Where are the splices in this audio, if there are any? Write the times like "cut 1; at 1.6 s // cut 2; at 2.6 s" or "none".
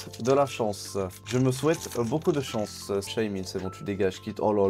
cut 1; at 1.2 s // cut 2; at 3.1 s